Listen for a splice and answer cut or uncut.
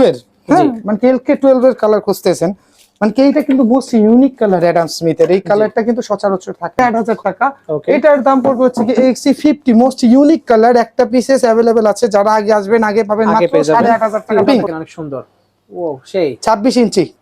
cut